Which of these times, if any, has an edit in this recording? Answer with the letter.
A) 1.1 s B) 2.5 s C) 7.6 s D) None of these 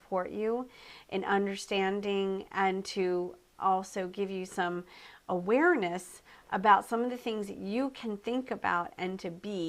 C